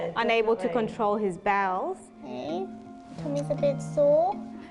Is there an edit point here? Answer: yes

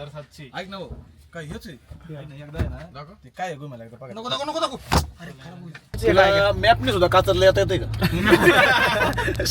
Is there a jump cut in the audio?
yes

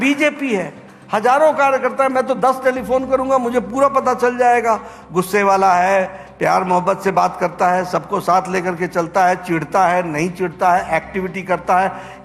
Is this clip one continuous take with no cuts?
yes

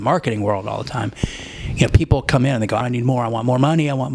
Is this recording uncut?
no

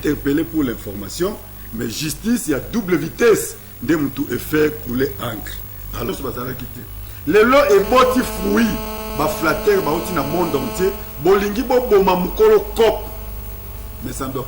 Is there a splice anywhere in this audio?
yes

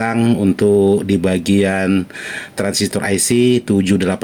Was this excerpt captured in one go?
yes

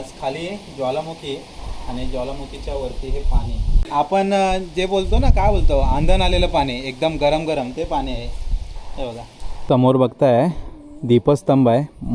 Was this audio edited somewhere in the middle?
yes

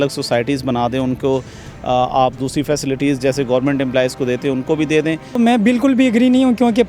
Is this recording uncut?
no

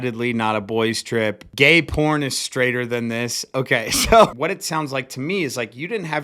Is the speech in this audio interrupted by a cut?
yes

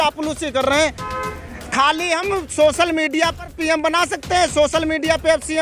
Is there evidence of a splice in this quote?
no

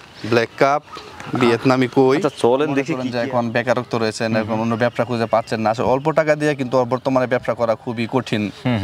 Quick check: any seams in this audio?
yes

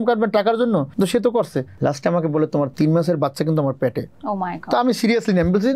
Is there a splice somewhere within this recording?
yes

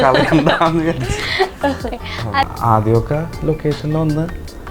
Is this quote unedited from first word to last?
no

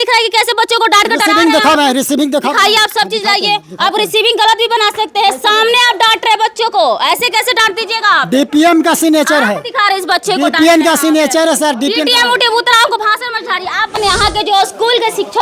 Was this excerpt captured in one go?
no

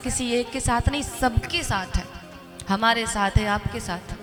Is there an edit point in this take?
no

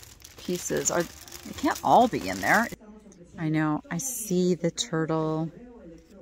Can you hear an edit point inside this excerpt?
yes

